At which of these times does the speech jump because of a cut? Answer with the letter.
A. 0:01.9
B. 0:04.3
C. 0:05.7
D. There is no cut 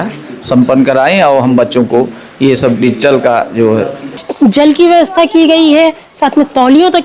B